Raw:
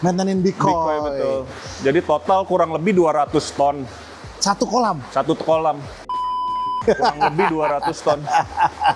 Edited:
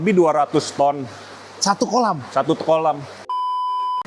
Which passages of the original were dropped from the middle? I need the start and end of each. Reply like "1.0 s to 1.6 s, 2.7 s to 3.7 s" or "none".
none